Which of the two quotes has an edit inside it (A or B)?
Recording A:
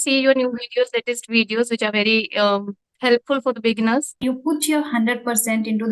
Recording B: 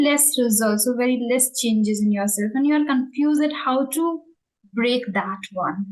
A